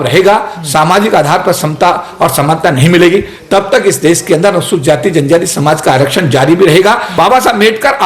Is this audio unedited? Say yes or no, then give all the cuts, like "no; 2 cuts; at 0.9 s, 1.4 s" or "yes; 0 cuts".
no; 1 cut; at 7.1 s